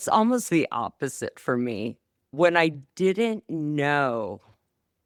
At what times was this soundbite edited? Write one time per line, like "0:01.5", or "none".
none